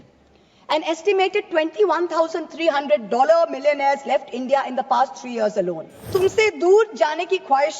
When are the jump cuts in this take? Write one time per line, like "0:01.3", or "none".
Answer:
0:06.1